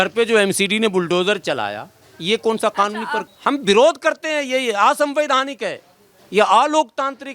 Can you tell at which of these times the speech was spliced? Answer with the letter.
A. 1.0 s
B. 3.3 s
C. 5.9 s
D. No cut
B